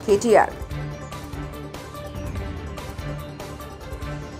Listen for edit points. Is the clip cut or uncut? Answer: uncut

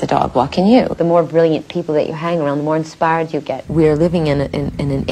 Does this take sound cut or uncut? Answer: cut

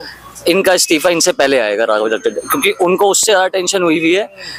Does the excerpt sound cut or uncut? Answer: uncut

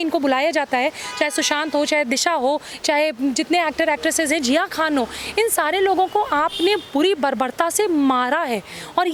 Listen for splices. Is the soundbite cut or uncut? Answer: uncut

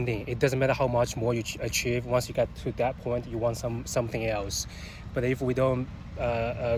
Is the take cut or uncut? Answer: uncut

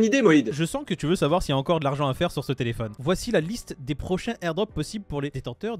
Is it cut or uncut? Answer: cut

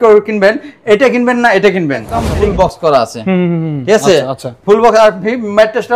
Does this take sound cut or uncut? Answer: cut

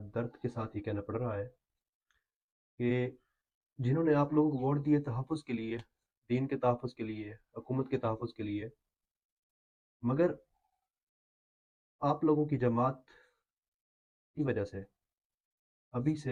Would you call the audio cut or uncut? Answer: uncut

